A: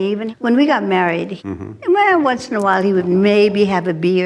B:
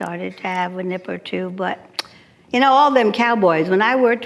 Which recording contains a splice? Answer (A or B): A